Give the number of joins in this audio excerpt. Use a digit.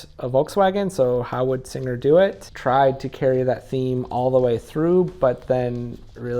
1